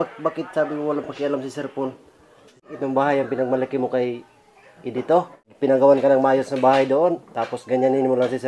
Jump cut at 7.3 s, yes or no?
no